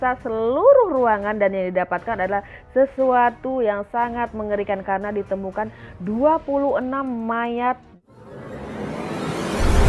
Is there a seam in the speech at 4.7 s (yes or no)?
no